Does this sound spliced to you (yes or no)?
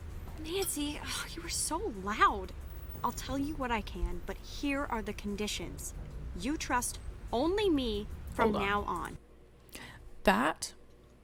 no